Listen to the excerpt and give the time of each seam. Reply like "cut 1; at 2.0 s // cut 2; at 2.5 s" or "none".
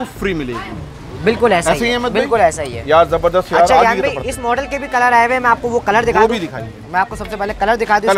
none